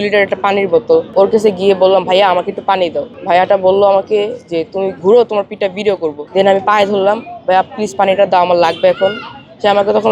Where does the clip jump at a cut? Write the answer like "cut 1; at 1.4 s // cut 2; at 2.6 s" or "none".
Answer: cut 1; at 1.1 s // cut 2; at 3.1 s // cut 3; at 6.2 s